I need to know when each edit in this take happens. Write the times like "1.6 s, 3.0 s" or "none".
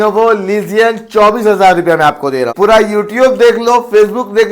2.5 s

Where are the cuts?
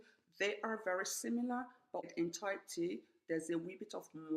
2.1 s

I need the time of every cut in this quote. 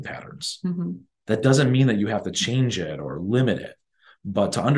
none

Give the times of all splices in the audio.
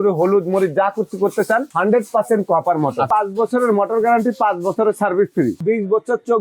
1.7 s, 3.1 s, 5.6 s

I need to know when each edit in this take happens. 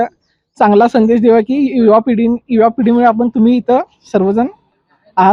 none

